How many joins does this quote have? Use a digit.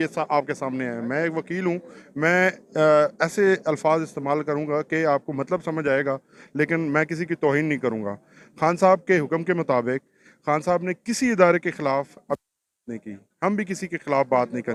0